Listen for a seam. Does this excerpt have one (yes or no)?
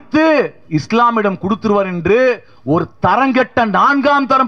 no